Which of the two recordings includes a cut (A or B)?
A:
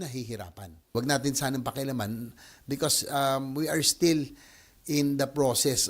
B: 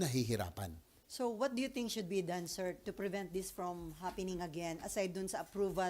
A